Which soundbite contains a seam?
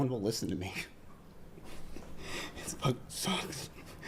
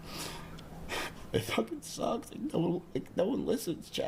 first; 1 cut; at 2.5 s

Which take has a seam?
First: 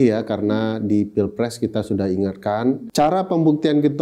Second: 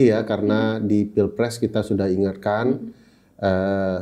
first; 1 cut; at 2.8 s

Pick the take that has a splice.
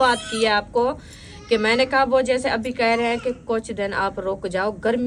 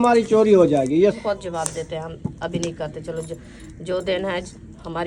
second; 1 cut; at 1.0 s

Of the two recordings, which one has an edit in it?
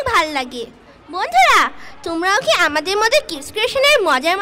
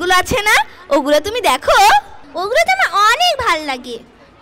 second; 1 cut; at 2.2 s

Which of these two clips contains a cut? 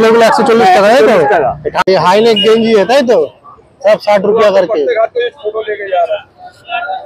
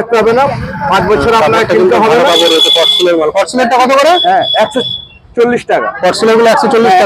first; 1 cut; at 1.8 s

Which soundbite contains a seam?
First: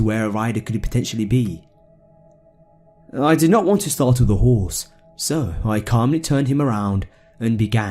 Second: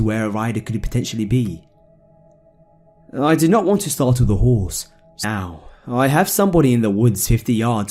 first; 1 cut; at 5.1 s

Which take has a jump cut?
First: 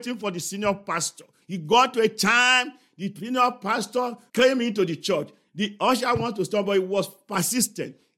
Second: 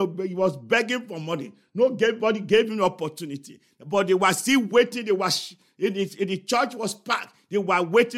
first; 3 cuts; at 1.3 s, 4.2 s, 5.4 s

